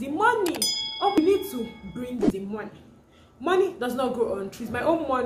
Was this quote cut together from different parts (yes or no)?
yes